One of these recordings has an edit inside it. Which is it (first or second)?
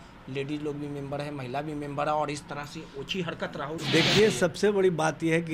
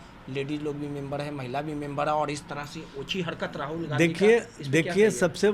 first